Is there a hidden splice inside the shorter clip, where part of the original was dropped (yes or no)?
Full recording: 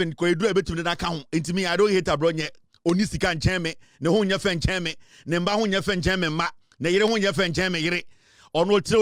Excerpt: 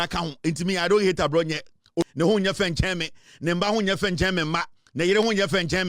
yes